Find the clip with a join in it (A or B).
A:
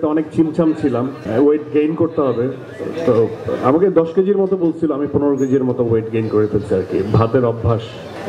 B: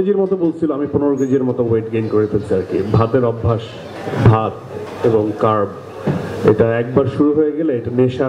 A